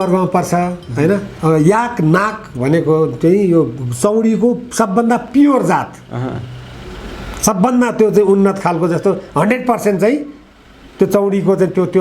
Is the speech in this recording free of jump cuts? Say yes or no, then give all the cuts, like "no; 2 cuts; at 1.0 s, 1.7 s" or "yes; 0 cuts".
no; 1 cut; at 1.3 s